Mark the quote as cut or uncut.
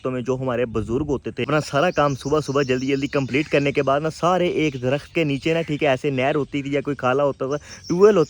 cut